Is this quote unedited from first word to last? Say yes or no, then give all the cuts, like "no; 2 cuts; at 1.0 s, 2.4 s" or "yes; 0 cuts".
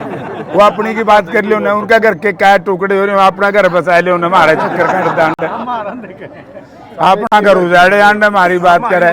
yes; 0 cuts